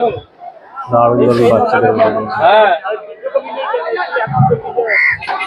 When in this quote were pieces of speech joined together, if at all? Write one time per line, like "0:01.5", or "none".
none

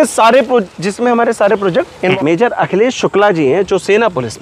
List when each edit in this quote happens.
0:02.1

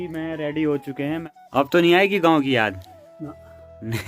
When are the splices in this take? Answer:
0:01.2

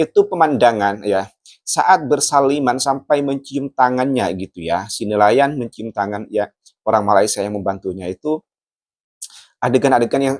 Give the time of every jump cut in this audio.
none

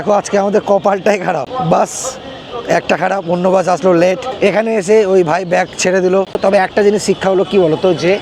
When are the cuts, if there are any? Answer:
0:01.5
0:04.3
0:06.3

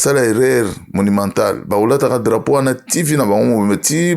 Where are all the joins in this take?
none

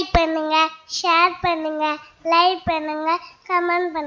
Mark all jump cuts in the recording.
none

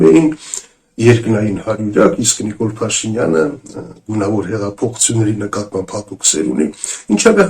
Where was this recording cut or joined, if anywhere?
none

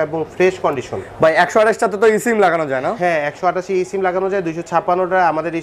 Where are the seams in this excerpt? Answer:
none

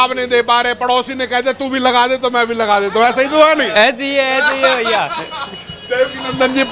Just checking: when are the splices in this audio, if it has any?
none

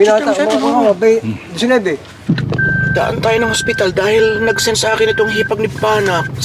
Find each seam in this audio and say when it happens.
0:02.2

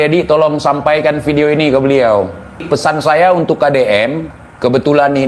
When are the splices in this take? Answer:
0:02.6

